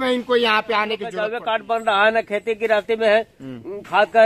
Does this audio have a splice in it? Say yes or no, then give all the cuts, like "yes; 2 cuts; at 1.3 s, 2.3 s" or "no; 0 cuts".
yes; 1 cut; at 1.4 s